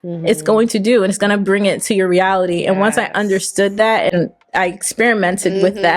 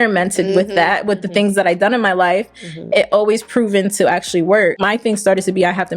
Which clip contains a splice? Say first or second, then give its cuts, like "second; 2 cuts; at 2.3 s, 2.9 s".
second; 1 cut; at 4.8 s